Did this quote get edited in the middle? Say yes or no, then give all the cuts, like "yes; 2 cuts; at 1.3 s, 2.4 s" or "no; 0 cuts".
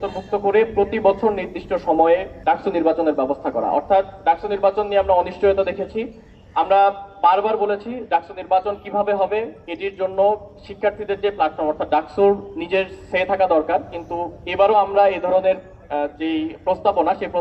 no; 0 cuts